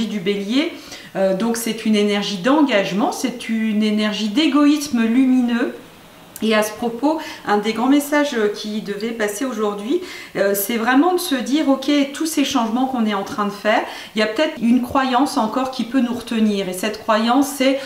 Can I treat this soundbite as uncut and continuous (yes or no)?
no